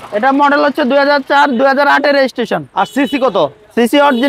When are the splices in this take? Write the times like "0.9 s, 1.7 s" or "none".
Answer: none